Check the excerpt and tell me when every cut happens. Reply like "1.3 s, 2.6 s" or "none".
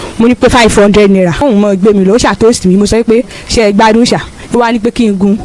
1.4 s, 4.4 s